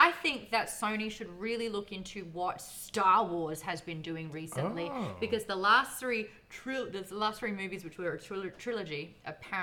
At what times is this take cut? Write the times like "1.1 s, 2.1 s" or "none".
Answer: none